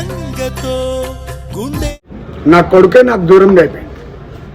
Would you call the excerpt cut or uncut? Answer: cut